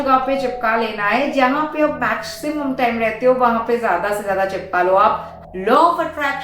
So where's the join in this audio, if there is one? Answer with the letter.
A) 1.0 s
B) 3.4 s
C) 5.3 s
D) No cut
C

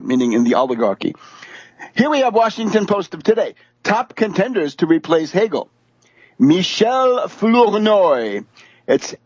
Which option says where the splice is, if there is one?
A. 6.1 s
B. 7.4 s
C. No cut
B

